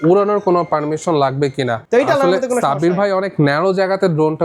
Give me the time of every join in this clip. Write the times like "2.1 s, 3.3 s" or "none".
1.8 s